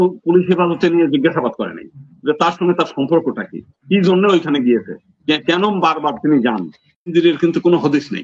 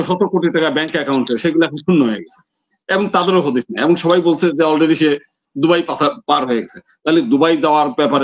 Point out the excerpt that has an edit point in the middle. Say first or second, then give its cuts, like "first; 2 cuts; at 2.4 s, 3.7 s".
first; 1 cut; at 7.1 s